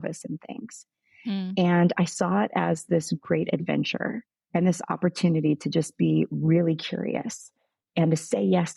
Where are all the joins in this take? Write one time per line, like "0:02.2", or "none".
none